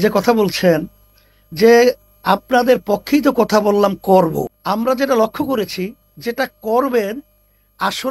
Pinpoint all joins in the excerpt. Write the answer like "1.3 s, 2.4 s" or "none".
4.6 s